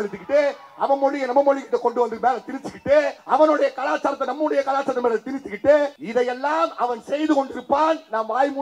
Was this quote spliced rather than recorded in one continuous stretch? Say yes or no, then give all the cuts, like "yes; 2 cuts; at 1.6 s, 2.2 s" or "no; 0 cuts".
yes; 2 cuts; at 3.2 s, 6.0 s